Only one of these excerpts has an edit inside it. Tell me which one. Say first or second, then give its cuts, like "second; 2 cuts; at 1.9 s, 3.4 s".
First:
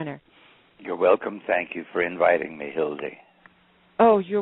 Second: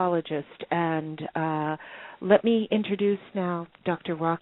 second; 1 cut; at 2.9 s